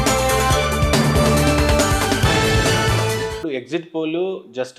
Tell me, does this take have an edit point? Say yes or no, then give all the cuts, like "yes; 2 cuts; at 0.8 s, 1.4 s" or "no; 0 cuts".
yes; 1 cut; at 3.4 s